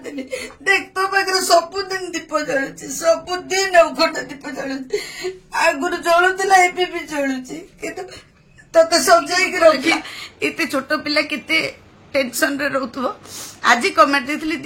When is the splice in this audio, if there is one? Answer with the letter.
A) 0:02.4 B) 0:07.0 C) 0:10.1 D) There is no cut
C